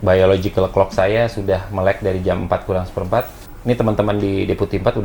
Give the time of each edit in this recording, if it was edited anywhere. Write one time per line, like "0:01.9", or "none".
0:03.4